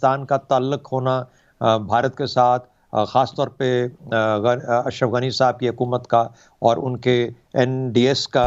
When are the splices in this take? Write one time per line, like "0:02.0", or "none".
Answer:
none